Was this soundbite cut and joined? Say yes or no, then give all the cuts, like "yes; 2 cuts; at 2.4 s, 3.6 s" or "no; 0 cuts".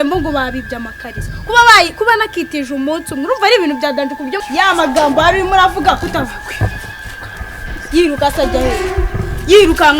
yes; 1 cut; at 4.4 s